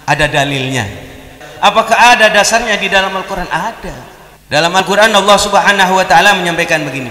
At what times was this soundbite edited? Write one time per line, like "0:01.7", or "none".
0:01.4
0:04.8